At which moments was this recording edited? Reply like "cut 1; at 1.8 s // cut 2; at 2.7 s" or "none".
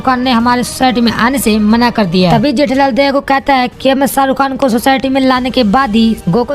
cut 1; at 2.3 s

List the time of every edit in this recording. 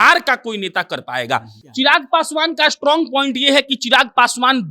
cut 1; at 1.6 s

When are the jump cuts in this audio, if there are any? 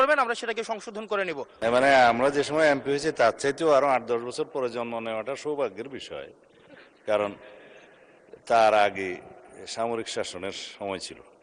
cut 1; at 1.5 s

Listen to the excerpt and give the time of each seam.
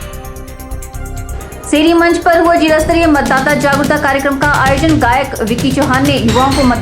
cut 1; at 1.3 s

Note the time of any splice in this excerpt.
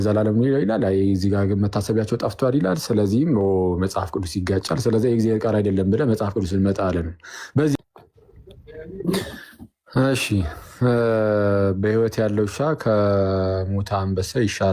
cut 1; at 7.8 s

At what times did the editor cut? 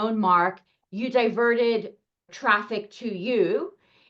cut 1; at 2.3 s

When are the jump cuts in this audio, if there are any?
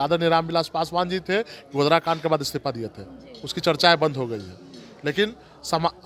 none

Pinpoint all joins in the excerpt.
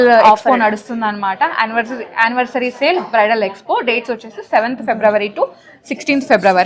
none

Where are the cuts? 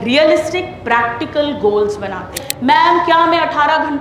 cut 1; at 2.5 s

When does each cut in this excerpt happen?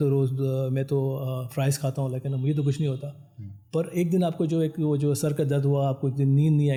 none

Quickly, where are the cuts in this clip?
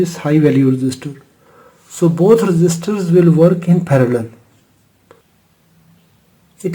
cut 1; at 5.7 s

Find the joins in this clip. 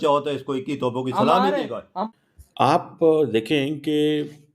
cut 1; at 2.1 s

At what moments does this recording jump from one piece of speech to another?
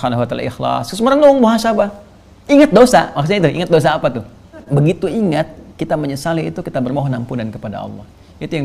cut 1; at 4.6 s

